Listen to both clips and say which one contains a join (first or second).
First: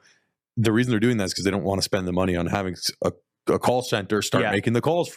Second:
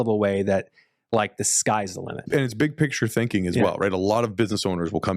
second